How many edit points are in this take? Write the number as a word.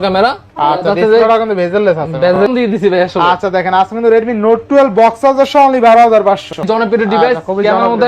two